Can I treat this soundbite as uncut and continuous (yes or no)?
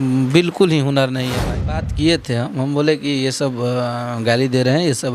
no